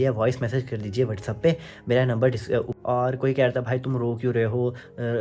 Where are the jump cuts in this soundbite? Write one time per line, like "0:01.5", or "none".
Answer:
0:02.7